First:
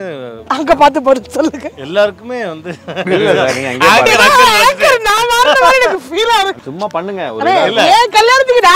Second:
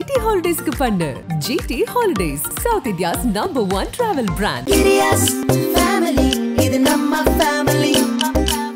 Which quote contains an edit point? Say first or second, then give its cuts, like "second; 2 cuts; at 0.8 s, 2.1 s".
first; 1 cut; at 6.6 s